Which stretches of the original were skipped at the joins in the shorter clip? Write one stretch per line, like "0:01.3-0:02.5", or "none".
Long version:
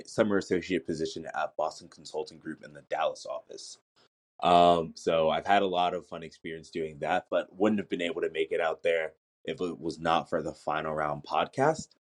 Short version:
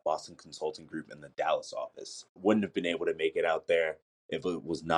0:03.9-0:07.5